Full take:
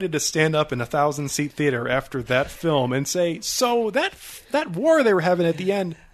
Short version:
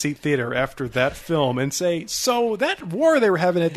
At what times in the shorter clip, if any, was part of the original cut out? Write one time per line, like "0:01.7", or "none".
0:02.9